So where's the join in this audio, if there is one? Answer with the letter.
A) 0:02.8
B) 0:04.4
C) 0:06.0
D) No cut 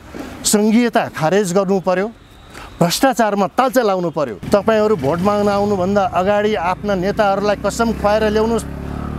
B